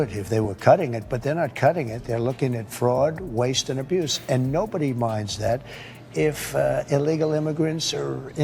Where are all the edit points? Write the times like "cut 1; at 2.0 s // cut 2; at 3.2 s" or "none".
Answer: none